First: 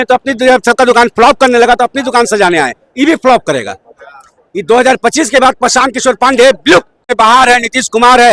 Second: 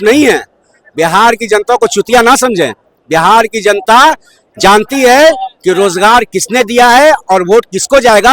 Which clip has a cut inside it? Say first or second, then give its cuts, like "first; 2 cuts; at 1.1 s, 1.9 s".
first; 1 cut; at 7.1 s